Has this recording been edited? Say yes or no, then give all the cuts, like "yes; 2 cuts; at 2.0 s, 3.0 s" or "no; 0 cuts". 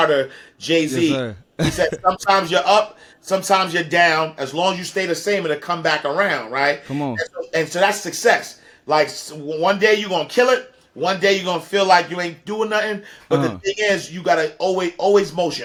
no; 0 cuts